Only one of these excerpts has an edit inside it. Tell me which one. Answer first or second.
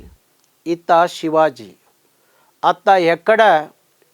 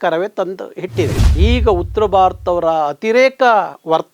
second